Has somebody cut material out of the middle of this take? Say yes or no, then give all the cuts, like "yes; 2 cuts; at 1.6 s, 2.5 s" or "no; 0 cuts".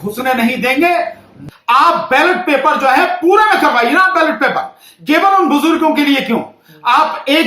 yes; 1 cut; at 1.4 s